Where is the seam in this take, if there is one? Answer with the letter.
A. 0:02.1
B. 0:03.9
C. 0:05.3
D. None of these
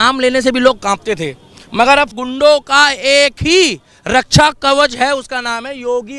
A